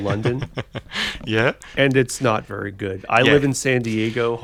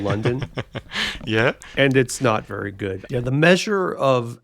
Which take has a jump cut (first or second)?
second